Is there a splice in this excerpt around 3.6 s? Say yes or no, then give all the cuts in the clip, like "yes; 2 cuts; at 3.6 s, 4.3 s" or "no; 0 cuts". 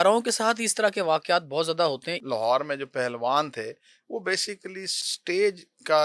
no; 2 cuts; at 2.1 s, 5.0 s